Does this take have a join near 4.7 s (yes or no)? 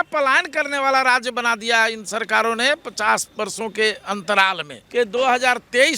yes